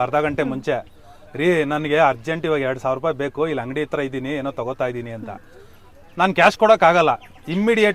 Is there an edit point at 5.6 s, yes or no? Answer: no